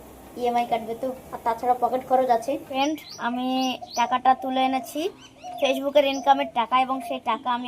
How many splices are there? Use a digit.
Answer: 1